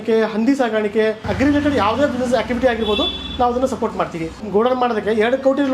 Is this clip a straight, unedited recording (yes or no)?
no